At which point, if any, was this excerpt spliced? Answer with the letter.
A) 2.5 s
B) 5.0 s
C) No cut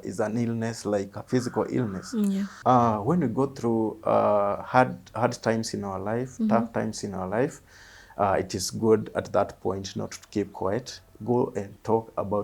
A